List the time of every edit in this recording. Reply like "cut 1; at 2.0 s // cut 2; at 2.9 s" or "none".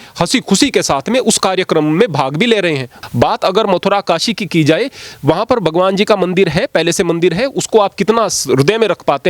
cut 1; at 2.9 s